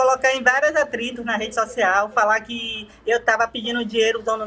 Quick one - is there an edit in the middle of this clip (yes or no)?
no